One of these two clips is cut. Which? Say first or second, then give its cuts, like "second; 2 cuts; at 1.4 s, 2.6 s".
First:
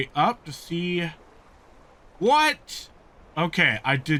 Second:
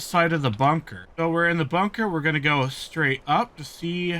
second; 1 cut; at 1.0 s